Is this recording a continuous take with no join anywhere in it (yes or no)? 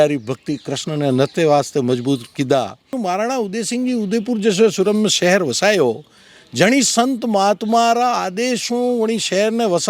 no